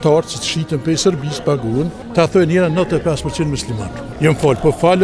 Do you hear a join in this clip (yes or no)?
yes